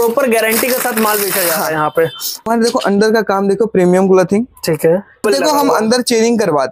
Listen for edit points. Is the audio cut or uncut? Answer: cut